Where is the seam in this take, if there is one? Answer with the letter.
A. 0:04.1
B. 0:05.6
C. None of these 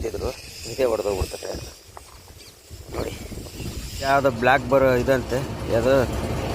A